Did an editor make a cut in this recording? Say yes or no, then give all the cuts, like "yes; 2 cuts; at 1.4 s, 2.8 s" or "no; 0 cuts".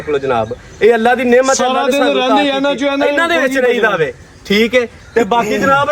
no; 0 cuts